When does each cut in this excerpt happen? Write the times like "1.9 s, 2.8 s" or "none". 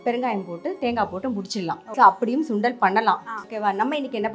1.9 s, 3.4 s